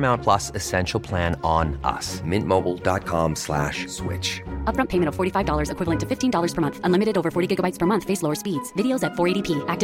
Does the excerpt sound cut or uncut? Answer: uncut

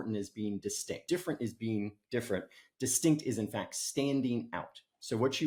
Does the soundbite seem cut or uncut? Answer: uncut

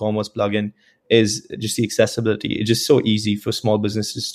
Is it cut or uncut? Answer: uncut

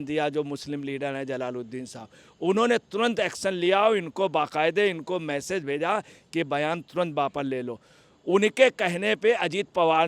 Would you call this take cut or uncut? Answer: uncut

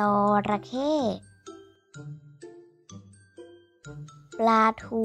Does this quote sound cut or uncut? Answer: uncut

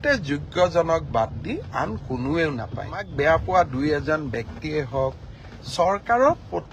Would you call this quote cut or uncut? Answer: cut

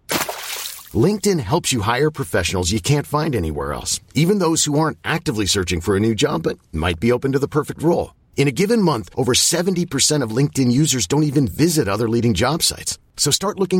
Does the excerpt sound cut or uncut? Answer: uncut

